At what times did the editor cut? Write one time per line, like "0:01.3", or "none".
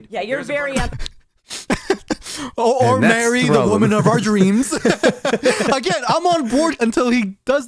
0:06.8